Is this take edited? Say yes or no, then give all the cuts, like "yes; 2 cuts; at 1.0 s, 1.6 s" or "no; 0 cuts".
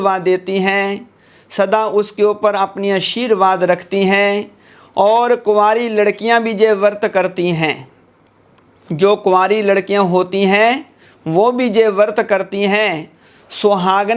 no; 0 cuts